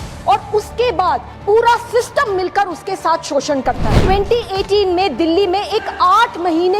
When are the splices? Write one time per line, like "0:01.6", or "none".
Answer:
0:01.3
0:04.0